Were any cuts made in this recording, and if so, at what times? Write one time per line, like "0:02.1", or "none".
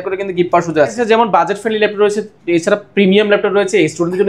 0:01.0